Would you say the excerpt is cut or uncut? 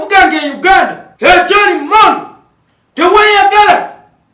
cut